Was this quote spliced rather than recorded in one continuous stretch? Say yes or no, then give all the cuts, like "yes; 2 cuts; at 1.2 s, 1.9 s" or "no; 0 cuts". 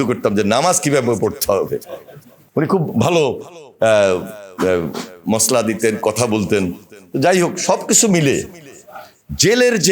no; 0 cuts